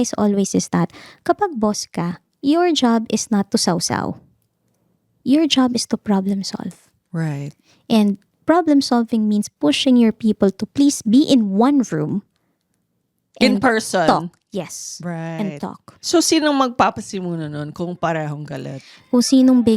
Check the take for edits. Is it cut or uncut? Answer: cut